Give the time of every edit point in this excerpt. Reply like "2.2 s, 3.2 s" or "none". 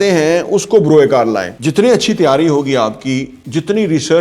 1.5 s